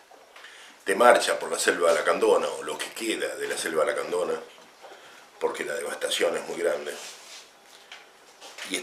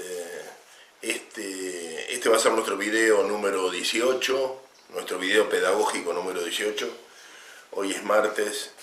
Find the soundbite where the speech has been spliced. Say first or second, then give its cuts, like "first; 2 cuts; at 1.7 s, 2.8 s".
second; 1 cut; at 0.9 s